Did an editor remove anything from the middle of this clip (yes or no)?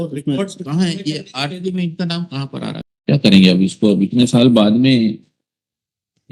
yes